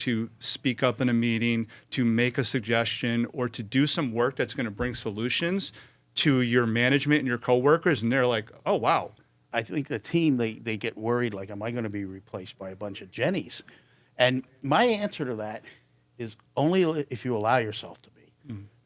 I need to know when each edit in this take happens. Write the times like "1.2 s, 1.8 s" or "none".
9.5 s